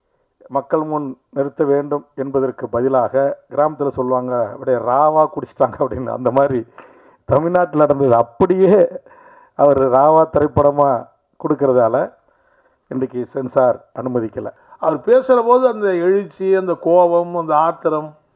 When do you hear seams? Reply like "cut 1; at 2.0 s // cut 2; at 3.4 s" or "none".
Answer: cut 1; at 14.5 s